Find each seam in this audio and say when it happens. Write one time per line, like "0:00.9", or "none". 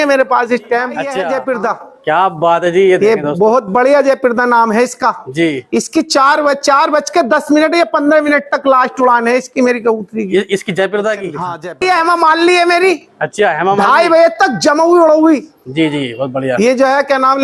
0:01.0
0:11.5